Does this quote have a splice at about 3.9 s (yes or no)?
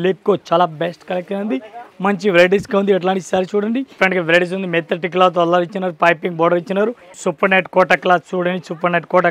yes